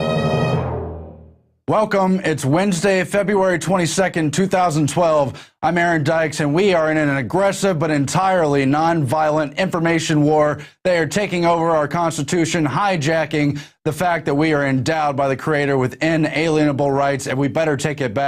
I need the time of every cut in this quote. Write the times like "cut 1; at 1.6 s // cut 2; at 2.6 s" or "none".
cut 1; at 12.4 s

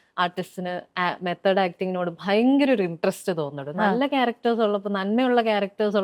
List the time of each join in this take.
none

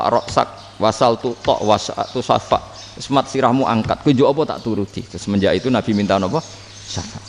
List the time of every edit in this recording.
none

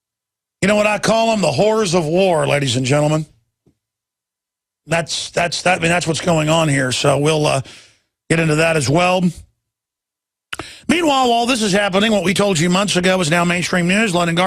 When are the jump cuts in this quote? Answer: cut 1; at 3.8 s

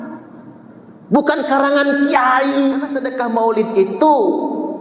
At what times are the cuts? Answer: cut 1; at 3.0 s

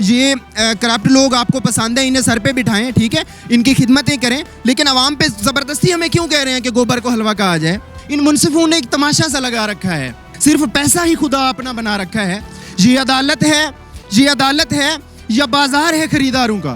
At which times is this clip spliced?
cut 1; at 7.9 s // cut 2; at 10.3 s

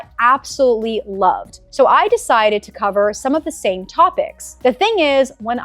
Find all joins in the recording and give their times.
cut 1; at 1.5 s // cut 2; at 4.4 s

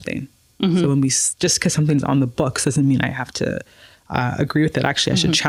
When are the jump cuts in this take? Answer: none

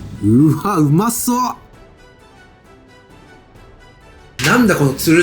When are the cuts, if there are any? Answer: none

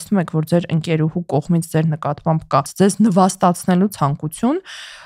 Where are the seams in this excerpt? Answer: cut 1; at 2.7 s // cut 2; at 3.9 s

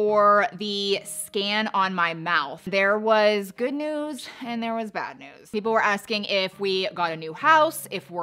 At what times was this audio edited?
cut 1; at 2.7 s // cut 2; at 5.4 s

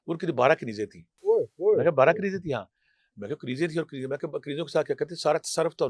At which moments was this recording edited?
cut 1; at 1.1 s

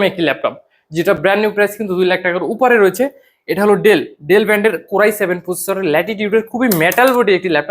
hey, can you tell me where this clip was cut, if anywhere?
none

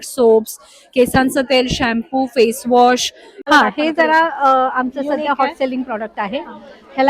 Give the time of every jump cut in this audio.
cut 1; at 3.3 s

